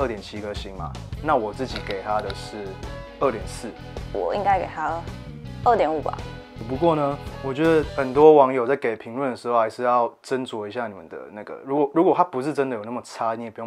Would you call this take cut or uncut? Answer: uncut